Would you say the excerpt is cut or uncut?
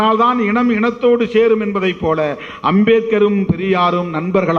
uncut